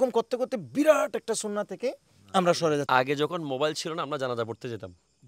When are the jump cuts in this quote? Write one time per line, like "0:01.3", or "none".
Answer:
0:02.9